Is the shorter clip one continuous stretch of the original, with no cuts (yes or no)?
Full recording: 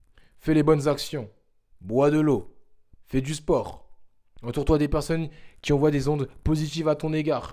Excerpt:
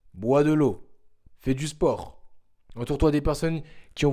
yes